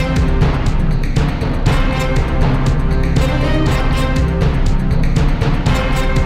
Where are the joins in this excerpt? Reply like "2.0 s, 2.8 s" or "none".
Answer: none